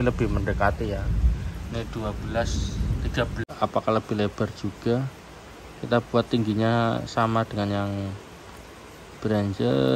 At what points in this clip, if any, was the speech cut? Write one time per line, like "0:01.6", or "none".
0:03.4